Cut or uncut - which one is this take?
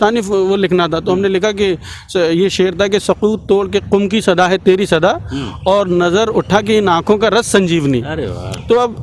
uncut